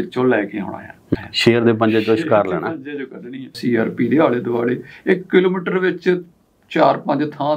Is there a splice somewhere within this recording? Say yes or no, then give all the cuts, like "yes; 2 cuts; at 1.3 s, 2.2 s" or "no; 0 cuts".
yes; 2 cuts; at 1.1 s, 3.6 s